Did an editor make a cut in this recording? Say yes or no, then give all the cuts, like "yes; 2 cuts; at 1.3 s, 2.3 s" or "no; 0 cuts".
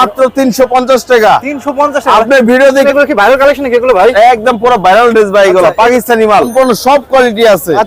yes; 2 cuts; at 2.8 s, 6.5 s